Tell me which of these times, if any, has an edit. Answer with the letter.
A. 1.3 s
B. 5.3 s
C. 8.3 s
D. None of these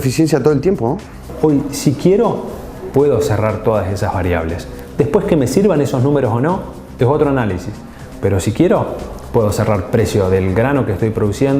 A